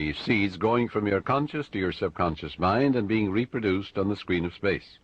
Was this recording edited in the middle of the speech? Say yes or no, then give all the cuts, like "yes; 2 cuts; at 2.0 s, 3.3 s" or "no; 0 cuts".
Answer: yes; 1 cut; at 1.9 s